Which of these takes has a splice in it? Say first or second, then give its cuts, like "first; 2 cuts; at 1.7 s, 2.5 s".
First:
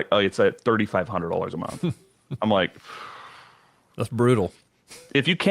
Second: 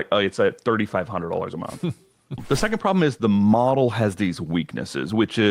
second; 1 cut; at 2.4 s